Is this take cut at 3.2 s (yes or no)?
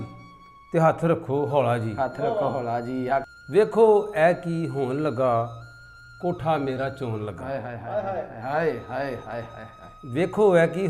yes